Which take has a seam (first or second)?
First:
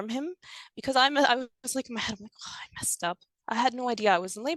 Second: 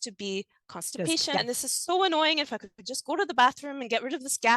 second